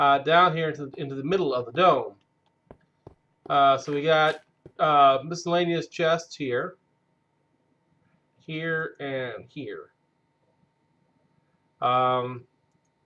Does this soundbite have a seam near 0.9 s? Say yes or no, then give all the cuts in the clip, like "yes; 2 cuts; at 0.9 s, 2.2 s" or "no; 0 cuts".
yes; 1 cut; at 0.9 s